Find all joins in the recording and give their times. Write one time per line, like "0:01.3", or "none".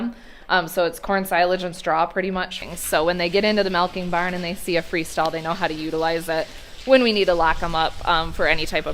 0:02.5